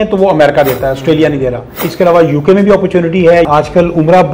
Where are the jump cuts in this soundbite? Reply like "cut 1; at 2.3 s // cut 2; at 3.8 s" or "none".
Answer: cut 1; at 1.9 s // cut 2; at 3.5 s